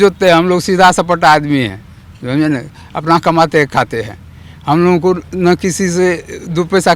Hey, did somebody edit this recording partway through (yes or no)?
no